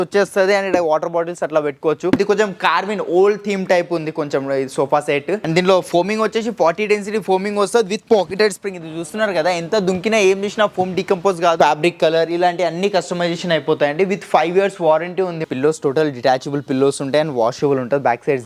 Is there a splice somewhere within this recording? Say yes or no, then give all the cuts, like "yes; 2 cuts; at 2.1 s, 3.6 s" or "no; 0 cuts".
yes; 4 cuts; at 2.2 s, 5.4 s, 11.6 s, 15.4 s